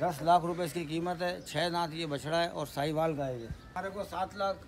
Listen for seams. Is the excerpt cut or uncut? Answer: cut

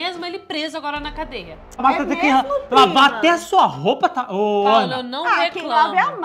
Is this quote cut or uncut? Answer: cut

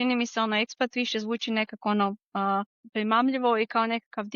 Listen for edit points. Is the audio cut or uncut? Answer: cut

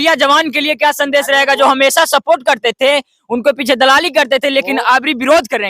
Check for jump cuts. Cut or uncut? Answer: uncut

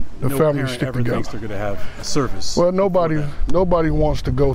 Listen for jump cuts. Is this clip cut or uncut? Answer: uncut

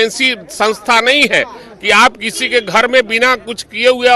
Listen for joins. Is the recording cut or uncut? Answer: uncut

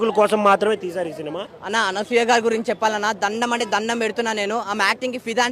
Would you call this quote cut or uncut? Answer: cut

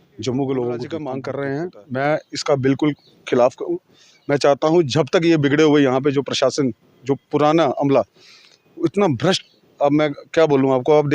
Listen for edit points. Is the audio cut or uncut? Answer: cut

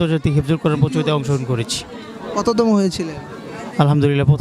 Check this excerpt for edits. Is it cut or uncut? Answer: uncut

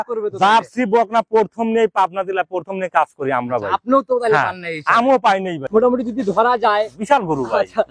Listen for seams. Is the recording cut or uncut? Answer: cut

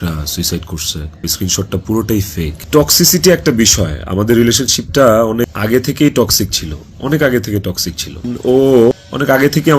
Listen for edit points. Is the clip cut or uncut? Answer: cut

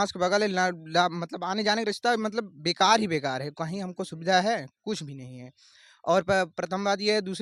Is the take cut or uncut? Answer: uncut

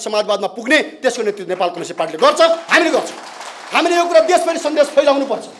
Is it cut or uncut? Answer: uncut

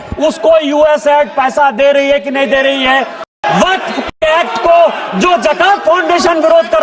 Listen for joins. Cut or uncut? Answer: cut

